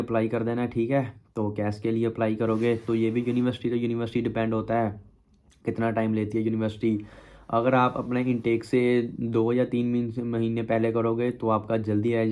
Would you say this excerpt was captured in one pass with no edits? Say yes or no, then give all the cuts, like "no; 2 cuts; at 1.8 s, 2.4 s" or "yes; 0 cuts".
yes; 0 cuts